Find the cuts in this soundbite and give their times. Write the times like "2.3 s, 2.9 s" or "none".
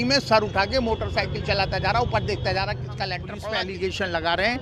3.3 s